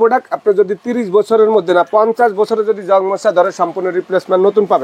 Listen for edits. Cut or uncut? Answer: uncut